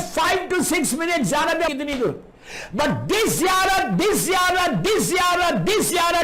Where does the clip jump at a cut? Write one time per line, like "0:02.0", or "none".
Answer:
0:01.7